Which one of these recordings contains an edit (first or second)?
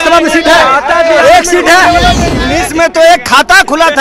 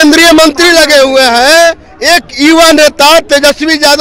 first